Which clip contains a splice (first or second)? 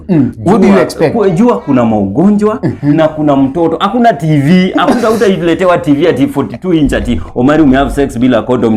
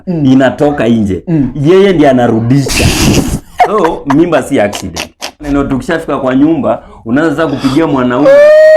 second